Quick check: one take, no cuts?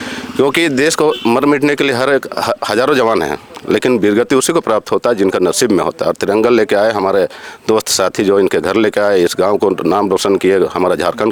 yes; 0 cuts

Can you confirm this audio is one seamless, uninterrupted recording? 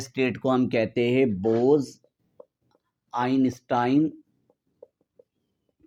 yes; 0 cuts

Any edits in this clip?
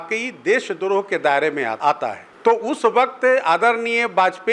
yes; 1 cut; at 1.8 s

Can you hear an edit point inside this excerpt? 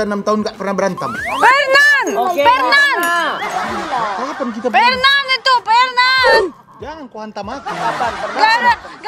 no; 0 cuts

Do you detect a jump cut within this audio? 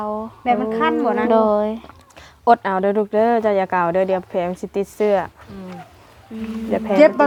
no; 0 cuts

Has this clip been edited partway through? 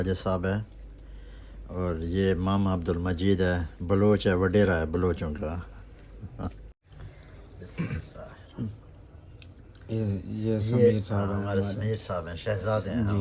yes; 1 cut; at 6.7 s

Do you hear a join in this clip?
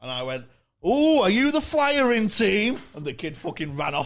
no; 0 cuts

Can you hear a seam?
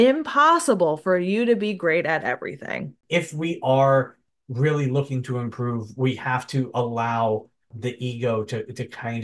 yes; 1 cut; at 2.9 s

